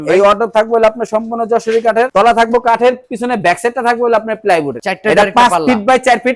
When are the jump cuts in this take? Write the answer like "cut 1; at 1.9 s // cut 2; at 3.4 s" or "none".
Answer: none